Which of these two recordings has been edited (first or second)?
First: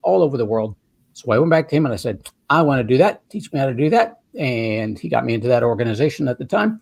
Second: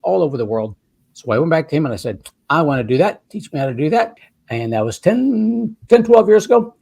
second